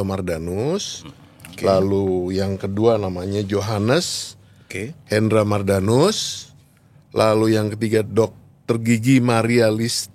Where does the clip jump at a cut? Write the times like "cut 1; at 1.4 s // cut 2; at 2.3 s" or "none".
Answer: none

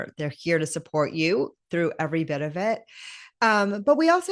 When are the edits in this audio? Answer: none

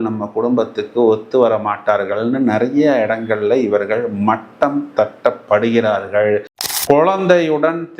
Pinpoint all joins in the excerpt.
cut 1; at 6.6 s

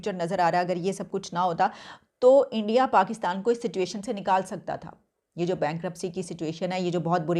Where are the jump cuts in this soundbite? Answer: none

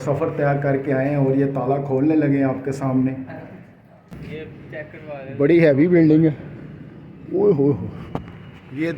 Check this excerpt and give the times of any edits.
cut 1; at 4.1 s

